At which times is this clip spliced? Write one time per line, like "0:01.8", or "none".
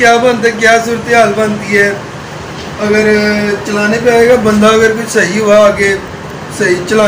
none